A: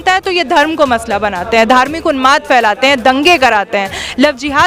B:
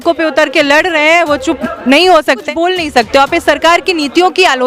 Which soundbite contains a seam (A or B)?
B